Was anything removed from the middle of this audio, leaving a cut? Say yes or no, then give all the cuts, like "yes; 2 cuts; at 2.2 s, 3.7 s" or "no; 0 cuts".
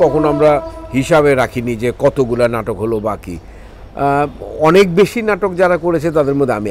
no; 0 cuts